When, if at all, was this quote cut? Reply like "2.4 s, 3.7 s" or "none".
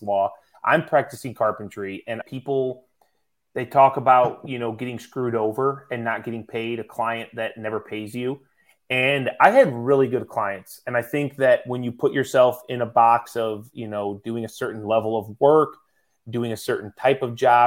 2.2 s